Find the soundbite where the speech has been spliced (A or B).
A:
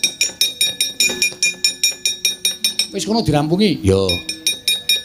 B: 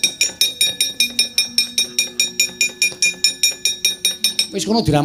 A